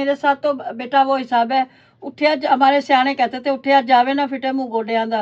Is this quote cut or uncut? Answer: uncut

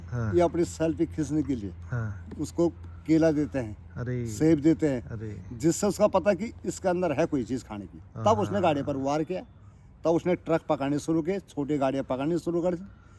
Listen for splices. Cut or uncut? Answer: uncut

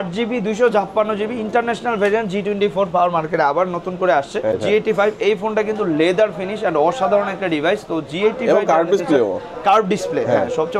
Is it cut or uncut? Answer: cut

